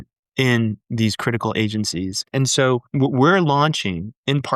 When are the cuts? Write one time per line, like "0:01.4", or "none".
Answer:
0:02.7